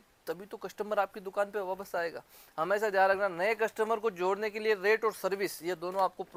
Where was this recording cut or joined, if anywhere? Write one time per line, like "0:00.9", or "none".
none